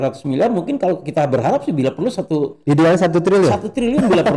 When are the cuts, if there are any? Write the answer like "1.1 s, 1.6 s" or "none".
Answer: none